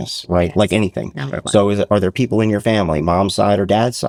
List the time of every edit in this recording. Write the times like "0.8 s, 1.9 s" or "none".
none

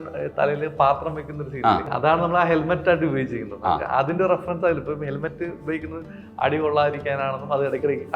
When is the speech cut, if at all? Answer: 1.8 s

